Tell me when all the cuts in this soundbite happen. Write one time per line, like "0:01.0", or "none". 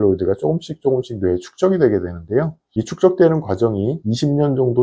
none